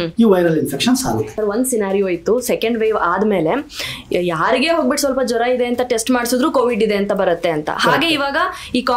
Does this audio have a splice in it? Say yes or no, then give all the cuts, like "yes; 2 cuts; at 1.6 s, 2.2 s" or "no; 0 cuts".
yes; 1 cut; at 1.3 s